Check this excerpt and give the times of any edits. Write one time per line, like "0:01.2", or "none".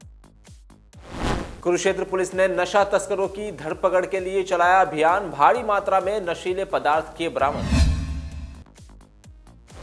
0:01.6